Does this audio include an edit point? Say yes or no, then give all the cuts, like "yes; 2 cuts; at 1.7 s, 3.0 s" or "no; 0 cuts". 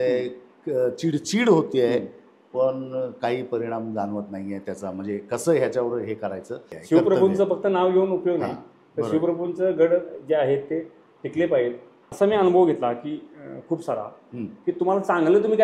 yes; 2 cuts; at 6.7 s, 12.1 s